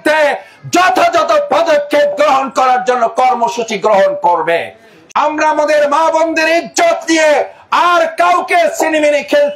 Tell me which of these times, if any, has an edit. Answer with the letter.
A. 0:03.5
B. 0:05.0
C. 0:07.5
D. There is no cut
B